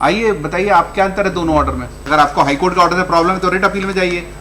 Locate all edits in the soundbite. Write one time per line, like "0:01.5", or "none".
0:02.0